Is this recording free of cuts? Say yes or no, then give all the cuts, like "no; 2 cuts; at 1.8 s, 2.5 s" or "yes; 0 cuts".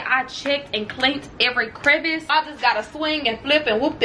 no; 1 cut; at 2.3 s